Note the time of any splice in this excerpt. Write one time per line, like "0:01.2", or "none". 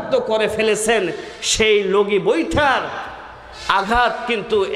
none